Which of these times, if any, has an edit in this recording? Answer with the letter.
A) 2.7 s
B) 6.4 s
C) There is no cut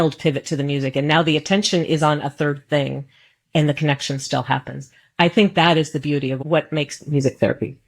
B